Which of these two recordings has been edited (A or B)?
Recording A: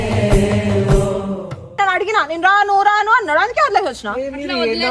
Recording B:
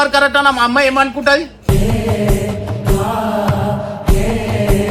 A